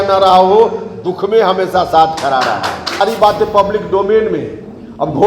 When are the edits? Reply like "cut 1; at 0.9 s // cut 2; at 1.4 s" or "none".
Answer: cut 1; at 3.0 s